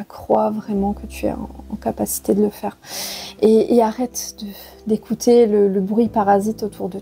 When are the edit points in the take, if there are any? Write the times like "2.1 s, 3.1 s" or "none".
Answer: none